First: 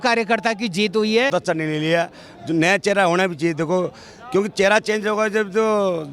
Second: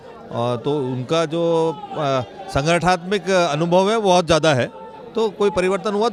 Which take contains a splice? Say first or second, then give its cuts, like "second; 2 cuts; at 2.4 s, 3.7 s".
first; 1 cut; at 1.3 s